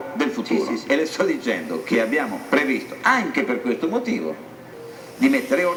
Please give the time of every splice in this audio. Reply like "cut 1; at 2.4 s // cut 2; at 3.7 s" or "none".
none